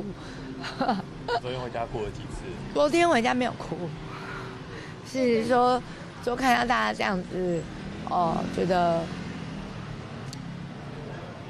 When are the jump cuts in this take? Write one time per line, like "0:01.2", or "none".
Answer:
0:02.7